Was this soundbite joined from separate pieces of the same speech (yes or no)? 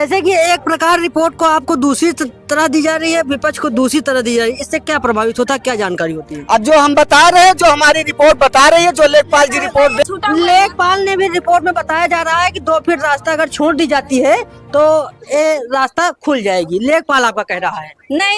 yes